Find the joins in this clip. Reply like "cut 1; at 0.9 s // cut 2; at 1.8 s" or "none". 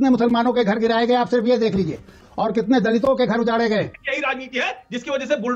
cut 1; at 2.2 s // cut 2; at 4.0 s